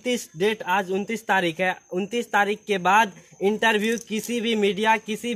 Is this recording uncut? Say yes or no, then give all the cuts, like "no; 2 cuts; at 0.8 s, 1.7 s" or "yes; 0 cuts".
yes; 0 cuts